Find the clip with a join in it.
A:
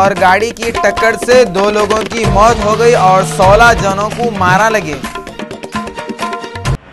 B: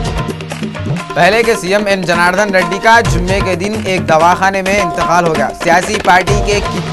B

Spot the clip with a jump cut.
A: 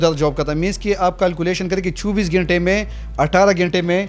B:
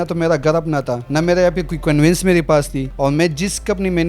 B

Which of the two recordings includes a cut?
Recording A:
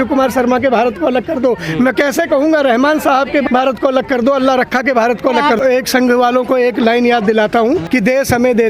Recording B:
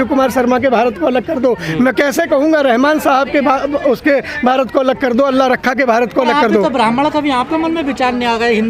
A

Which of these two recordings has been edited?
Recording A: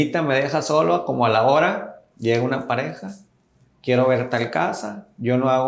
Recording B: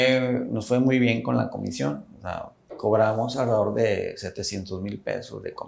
B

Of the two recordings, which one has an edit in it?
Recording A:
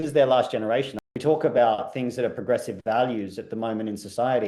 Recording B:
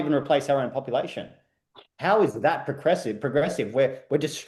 A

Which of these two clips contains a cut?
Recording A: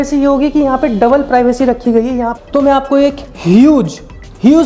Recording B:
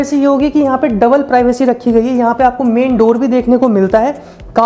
A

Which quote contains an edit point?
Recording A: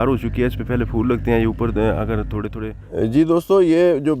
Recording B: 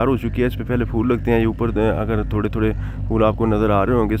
A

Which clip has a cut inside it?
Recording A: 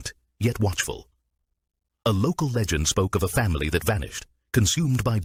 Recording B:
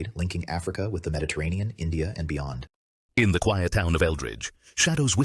B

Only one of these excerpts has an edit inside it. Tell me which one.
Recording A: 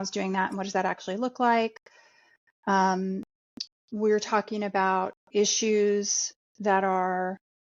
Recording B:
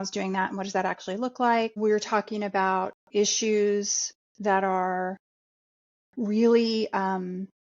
B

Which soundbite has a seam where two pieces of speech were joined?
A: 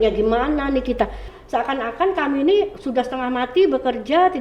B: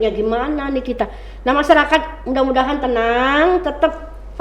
A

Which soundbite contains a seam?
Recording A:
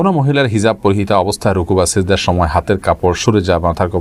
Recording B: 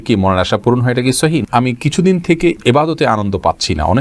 B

